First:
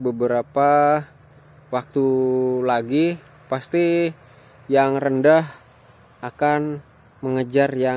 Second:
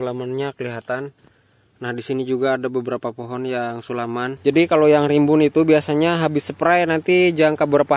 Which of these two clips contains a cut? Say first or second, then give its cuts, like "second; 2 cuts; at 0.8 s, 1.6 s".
second; 1 cut; at 4.3 s